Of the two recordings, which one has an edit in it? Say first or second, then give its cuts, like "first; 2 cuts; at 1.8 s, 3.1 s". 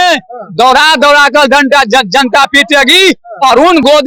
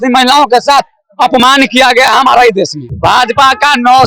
second; 1 cut; at 2.9 s